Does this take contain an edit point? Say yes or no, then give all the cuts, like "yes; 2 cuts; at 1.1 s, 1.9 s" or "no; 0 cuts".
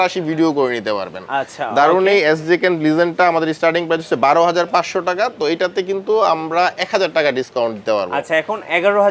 no; 0 cuts